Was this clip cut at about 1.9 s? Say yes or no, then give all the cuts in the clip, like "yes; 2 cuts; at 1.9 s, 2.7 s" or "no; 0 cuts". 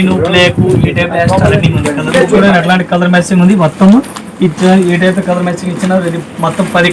yes; 1 cut; at 1.9 s